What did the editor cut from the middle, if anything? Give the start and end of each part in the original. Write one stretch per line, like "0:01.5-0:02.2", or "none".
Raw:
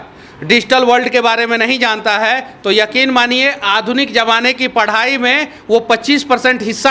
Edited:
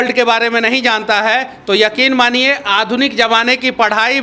none